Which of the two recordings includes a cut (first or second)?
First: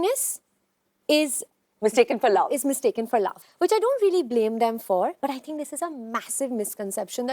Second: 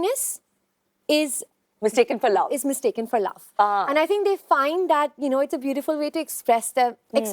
first